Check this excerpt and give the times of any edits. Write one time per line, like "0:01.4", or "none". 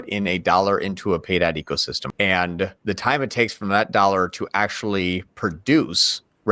0:02.0
0:02.8